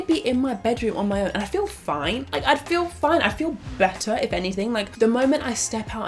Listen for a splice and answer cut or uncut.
uncut